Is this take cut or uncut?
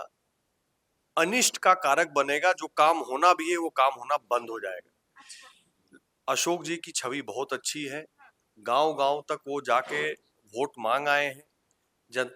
uncut